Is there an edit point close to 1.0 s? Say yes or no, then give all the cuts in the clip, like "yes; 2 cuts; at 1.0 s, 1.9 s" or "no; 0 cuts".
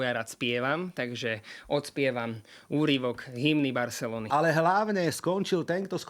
no; 1 cut; at 4.3 s